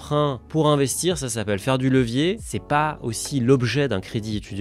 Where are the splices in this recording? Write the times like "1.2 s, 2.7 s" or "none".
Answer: none